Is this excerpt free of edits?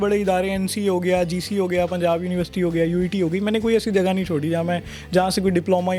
yes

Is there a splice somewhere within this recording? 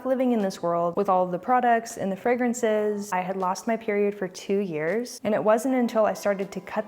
yes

